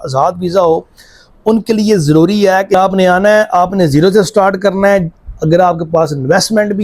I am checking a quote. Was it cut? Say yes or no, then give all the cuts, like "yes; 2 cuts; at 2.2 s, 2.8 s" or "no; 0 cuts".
yes; 1 cut; at 2.7 s